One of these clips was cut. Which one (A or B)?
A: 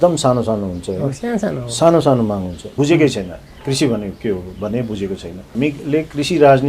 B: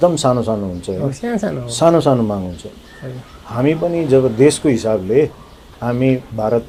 A